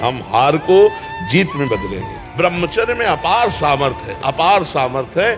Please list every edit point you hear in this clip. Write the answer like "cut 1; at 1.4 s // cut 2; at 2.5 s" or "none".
cut 1; at 2.2 s